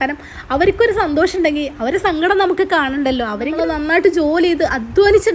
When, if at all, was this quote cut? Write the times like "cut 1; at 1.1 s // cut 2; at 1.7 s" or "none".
cut 1; at 3.5 s